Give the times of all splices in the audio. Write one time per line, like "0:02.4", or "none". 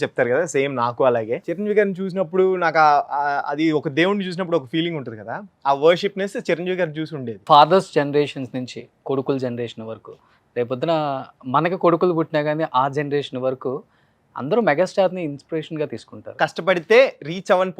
0:01.5
0:07.3
0:16.3